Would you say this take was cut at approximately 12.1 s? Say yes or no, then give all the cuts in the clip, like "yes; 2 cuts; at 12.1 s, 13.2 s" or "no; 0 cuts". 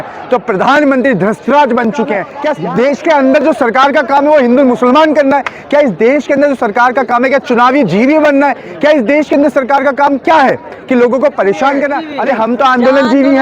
yes; 2 cuts; at 2.4 s, 12.1 s